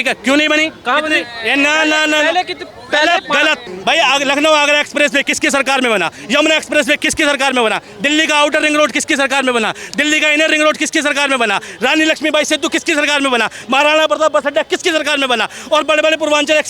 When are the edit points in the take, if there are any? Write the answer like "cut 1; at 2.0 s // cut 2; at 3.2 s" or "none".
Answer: cut 1; at 3.6 s